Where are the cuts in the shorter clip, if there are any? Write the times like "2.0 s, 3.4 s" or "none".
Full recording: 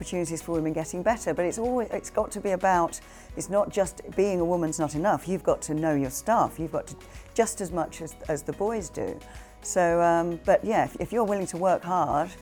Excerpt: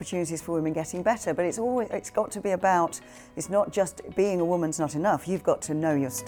none